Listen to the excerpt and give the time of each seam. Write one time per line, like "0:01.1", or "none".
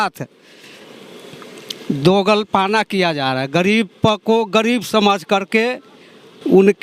none